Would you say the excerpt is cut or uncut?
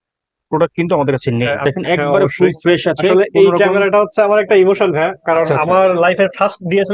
cut